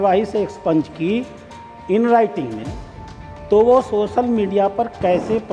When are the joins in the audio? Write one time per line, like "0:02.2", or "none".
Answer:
none